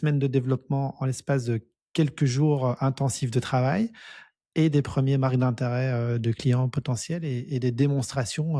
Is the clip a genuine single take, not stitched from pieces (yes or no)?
yes